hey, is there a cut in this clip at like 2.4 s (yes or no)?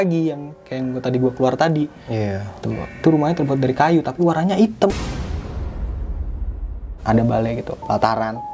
no